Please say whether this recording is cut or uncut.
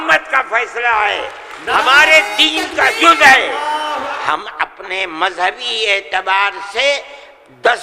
cut